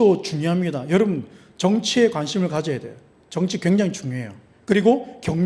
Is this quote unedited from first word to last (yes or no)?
yes